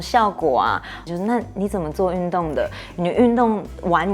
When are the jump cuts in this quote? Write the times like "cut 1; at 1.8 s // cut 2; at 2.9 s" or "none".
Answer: cut 1; at 1.0 s